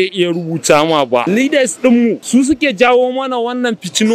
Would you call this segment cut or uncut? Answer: cut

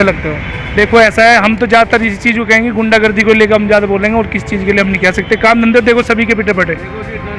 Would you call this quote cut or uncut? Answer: uncut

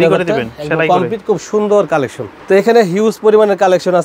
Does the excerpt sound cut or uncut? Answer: cut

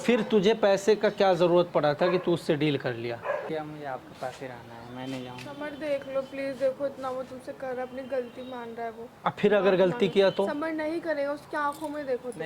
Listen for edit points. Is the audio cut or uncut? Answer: cut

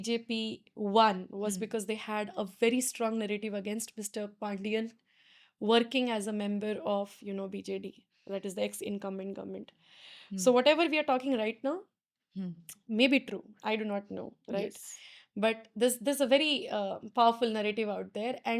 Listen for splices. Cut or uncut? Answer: uncut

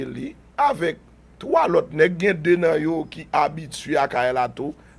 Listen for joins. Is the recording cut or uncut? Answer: cut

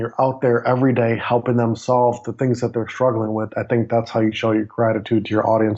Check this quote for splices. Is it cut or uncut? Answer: uncut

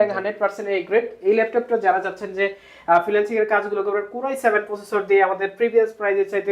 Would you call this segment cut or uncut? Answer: uncut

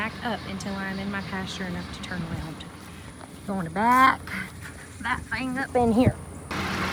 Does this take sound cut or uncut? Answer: uncut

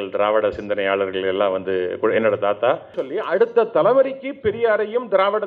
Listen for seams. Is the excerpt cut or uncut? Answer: cut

